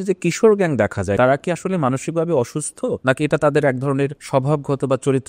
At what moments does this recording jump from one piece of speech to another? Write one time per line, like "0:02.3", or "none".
0:01.2
0:03.0
0:04.2